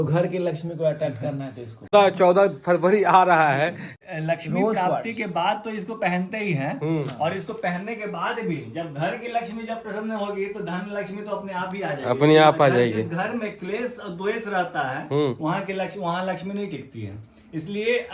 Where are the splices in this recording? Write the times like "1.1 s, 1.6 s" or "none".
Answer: 1.9 s, 3.9 s